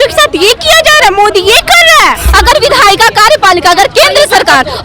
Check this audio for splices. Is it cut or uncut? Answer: cut